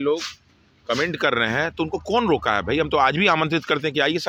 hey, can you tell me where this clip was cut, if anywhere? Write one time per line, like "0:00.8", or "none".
none